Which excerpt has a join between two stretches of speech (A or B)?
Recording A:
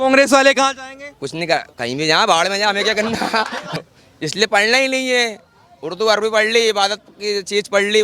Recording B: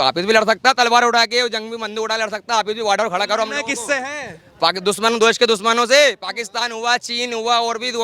A